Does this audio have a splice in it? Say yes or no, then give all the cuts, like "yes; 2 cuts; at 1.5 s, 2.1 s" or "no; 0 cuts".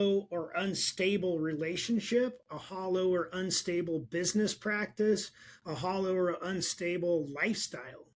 no; 0 cuts